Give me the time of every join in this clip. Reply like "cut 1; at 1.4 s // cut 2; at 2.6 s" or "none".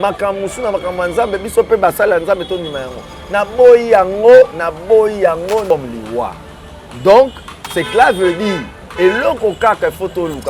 cut 1; at 5.7 s